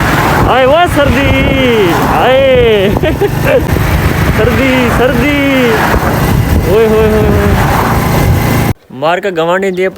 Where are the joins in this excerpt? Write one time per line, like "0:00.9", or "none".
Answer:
0:03.7
0:08.9